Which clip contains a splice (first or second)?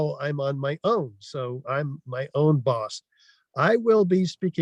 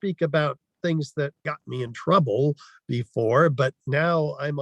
second